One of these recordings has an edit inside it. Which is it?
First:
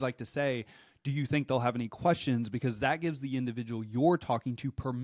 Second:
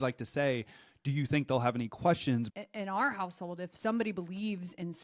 second; 1 cut; at 2.5 s

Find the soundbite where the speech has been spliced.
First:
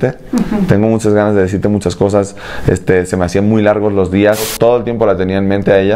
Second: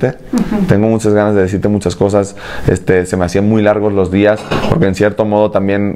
first; 1 cut; at 4.5 s

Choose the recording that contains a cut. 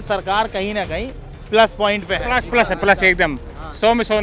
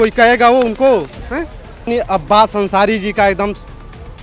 second; 1 cut; at 1.9 s

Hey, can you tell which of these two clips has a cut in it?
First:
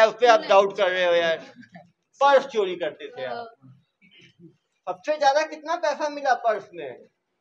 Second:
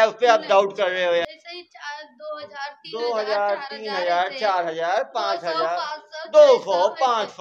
second; 1 cut; at 1.2 s

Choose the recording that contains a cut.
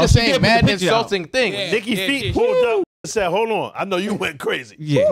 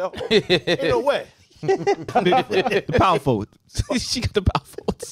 second; 1 cut; at 2.0 s

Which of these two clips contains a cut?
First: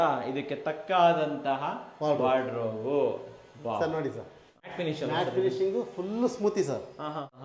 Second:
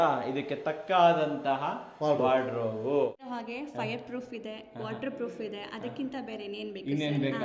second; 1 cut; at 3.2 s

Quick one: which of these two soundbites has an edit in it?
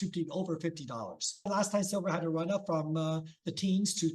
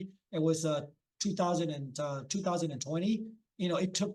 first; 1 cut; at 1.5 s

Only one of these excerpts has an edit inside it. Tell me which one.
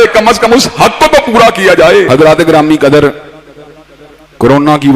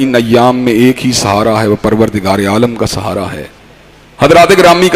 first; 1 cut; at 2.1 s

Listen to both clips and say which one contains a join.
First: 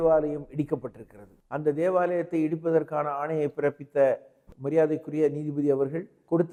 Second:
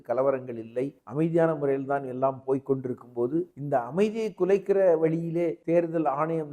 second; 3 cuts; at 1.0 s, 3.6 s, 5.6 s

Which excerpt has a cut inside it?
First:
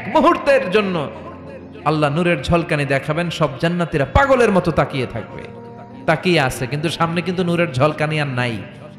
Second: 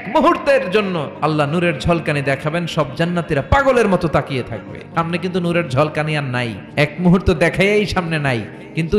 second; 3 cuts; at 1.1 s, 4.9 s, 6.6 s

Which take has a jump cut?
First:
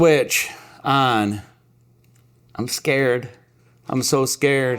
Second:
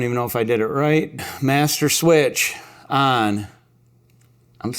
second; 1 cut; at 1.1 s

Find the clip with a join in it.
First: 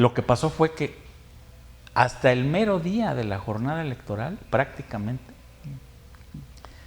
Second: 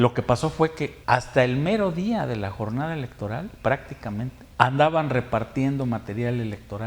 second; 2 cuts; at 1.0 s, 4.4 s

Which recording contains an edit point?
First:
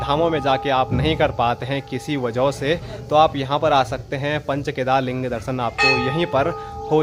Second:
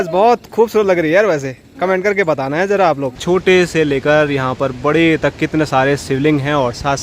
second; 1 cut; at 3.2 s

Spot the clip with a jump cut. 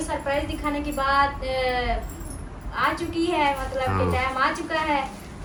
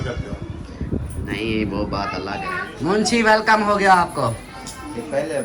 second; 1 cut; at 2.4 s

